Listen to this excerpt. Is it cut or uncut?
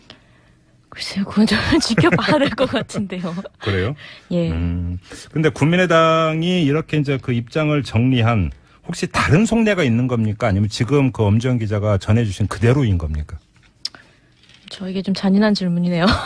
uncut